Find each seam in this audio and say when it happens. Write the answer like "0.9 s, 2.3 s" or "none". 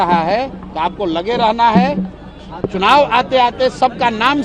none

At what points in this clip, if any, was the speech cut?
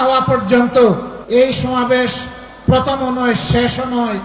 1.1 s

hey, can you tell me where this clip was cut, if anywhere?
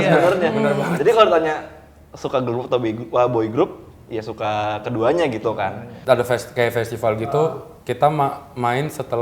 5.9 s

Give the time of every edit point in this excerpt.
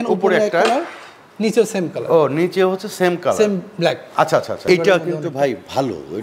4.6 s

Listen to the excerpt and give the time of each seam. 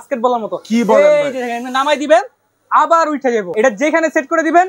3.5 s

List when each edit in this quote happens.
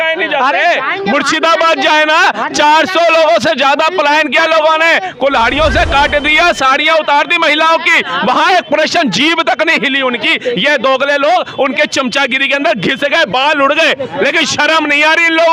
none

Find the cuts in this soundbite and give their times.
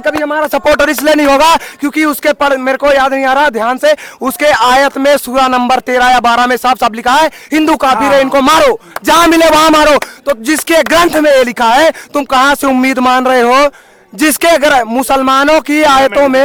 none

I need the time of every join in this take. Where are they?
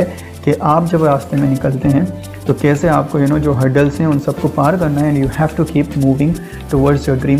none

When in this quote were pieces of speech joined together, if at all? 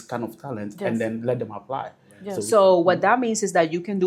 2.4 s

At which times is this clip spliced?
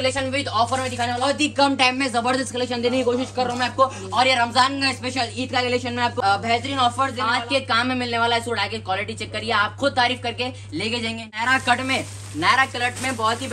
1.2 s, 6.1 s, 7.3 s, 11.3 s

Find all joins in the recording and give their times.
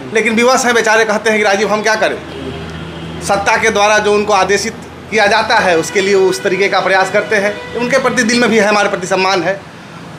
none

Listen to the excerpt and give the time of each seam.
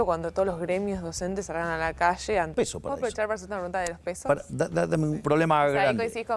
2.5 s, 5.2 s

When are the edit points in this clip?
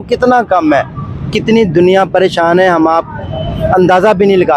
none

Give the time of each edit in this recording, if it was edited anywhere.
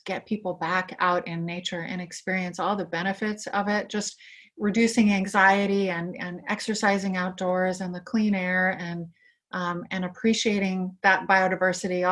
none

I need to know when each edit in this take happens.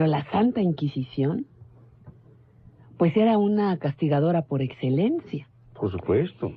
5.2 s

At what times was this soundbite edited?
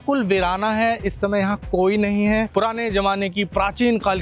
2.5 s

